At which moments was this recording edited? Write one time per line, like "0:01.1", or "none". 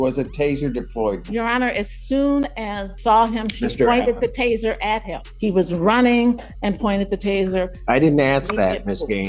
0:02.9
0:05.3